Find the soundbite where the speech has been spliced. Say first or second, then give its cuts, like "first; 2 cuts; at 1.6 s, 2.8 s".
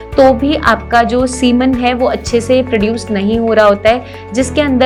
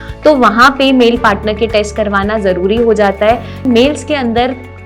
second; 1 cut; at 3.6 s